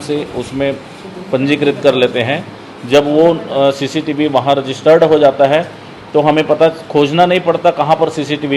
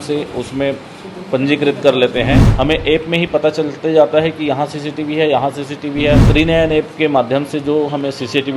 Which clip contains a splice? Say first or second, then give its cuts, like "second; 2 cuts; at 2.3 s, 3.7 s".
second; 2 cuts; at 2.5 s, 6.3 s